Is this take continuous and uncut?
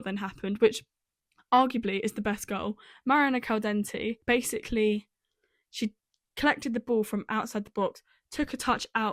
no; 1 cut; at 4.1 s

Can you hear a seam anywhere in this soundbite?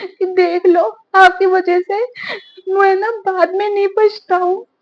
no; 0 cuts

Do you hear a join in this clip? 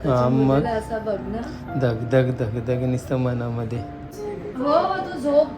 yes; 1 cut; at 4.1 s

